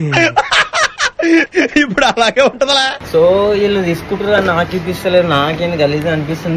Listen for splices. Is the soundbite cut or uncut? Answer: uncut